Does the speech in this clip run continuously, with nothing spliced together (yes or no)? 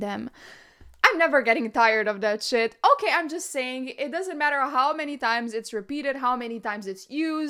yes